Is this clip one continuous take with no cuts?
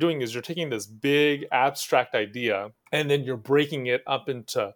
no; 1 cut; at 2.8 s

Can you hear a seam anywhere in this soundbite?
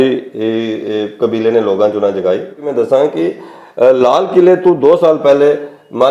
yes; 1 cut; at 2.6 s

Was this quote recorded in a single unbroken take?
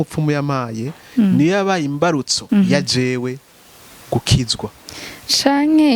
no; 1 cut; at 2.3 s

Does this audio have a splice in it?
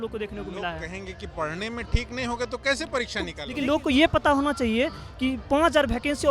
yes; 1 cut; at 3.4 s

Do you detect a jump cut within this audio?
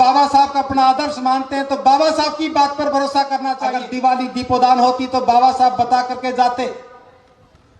yes; 1 cut; at 3.8 s

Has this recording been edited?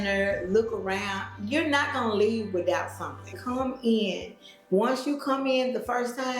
yes; 1 cut; at 3.4 s

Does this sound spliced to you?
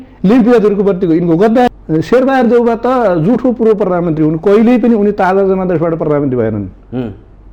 yes; 1 cut; at 1.7 s

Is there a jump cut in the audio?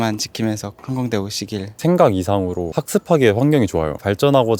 yes; 1 cut; at 1.8 s

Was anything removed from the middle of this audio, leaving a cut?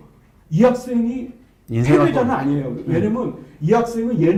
no; 0 cuts

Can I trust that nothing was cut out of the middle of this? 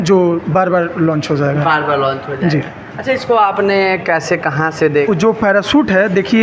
no; 1 cut; at 5.0 s

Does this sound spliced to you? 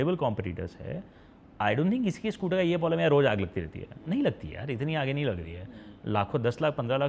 no; 0 cuts

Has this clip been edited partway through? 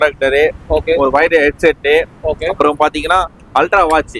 no; 0 cuts

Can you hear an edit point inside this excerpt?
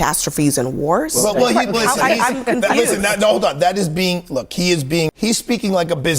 yes; 1 cut; at 5.1 s

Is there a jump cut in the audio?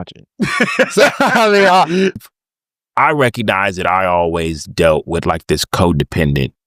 yes; 1 cut; at 2.2 s

